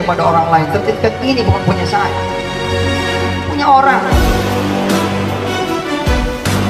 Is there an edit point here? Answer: no; 0 cuts

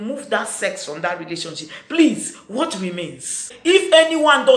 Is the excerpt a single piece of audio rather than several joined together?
no; 1 cut; at 3.5 s

